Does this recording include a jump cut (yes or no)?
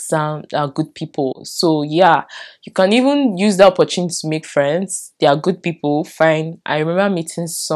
no